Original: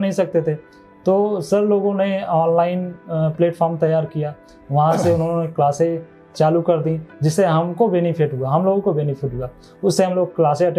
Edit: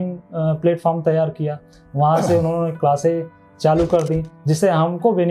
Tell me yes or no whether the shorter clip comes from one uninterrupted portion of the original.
yes